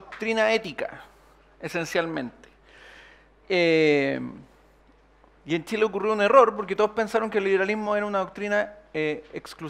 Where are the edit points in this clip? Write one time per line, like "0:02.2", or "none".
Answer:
none